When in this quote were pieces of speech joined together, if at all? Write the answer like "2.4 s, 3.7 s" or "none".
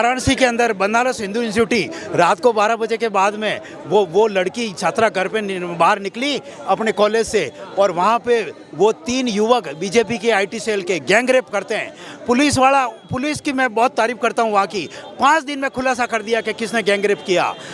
none